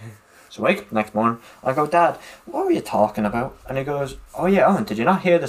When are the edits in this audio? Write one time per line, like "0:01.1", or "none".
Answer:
none